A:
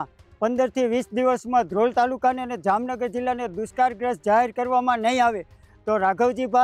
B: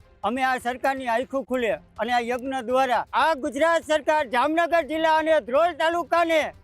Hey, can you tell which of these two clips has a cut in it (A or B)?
B